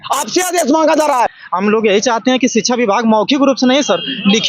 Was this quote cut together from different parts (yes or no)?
yes